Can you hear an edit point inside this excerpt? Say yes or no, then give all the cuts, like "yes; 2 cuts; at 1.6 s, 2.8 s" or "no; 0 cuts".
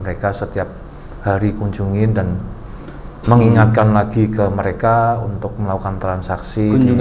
no; 0 cuts